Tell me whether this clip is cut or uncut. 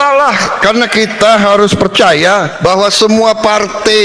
cut